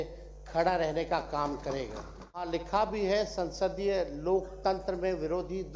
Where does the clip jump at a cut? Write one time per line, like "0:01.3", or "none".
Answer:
0:02.4